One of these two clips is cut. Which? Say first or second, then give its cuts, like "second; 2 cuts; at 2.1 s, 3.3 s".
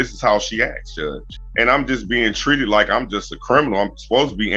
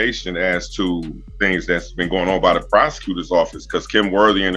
first; 1 cut; at 1.2 s